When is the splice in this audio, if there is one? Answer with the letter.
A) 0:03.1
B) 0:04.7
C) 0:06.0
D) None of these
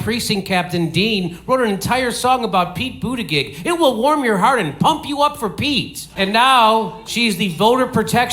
C